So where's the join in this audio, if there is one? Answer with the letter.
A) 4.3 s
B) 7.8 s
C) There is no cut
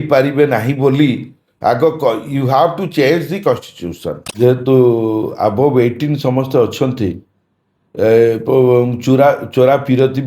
A